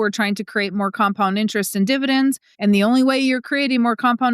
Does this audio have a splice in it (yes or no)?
yes